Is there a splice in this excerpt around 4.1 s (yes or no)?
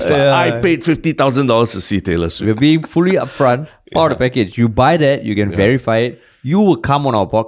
no